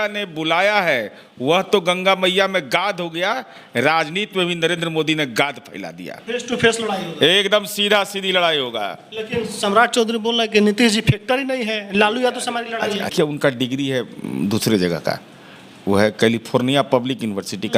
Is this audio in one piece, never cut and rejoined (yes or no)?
no